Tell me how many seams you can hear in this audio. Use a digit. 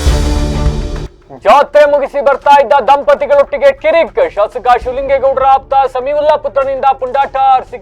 0